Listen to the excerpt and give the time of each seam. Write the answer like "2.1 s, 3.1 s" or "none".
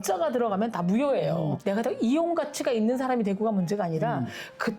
1.6 s